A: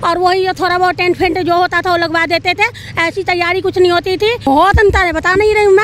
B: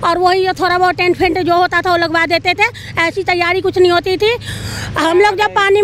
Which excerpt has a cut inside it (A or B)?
A